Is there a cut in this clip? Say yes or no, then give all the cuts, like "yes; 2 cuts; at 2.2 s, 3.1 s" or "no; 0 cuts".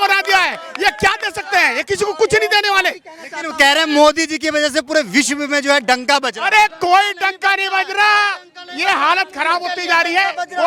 no; 0 cuts